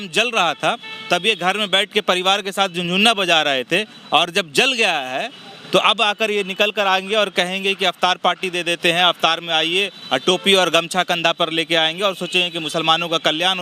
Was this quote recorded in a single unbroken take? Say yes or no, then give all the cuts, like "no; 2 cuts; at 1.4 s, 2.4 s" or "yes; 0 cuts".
yes; 0 cuts